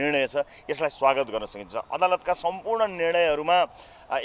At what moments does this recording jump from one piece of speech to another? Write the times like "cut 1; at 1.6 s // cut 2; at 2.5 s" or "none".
none